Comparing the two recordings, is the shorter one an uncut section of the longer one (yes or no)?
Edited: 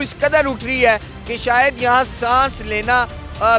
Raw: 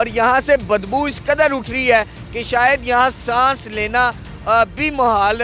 yes